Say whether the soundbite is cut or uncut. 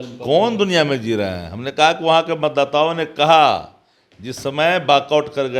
uncut